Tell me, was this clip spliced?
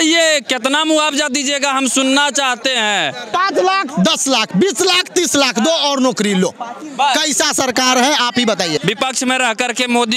yes; 2 cuts; at 3.3 s, 8.8 s

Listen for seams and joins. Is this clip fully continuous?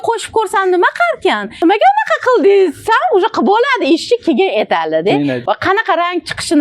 no; 2 cuts; at 1.6 s, 5.4 s

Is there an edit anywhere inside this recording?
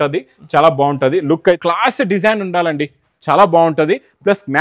yes; 1 cut; at 1.6 s

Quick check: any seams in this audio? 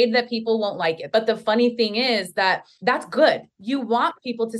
yes; 3 cuts; at 1.0 s, 2.7 s, 3.5 s

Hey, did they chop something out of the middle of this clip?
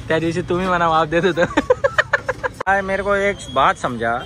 yes; 1 cut; at 2.7 s

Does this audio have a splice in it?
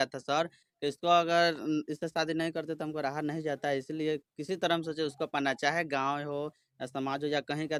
no; 0 cuts

